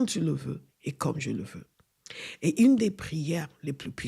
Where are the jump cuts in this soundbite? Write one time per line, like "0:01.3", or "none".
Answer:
none